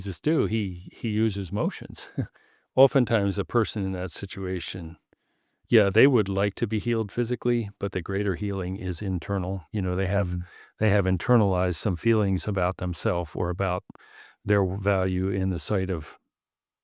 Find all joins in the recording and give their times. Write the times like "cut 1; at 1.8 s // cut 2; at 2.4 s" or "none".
cut 1; at 2.4 s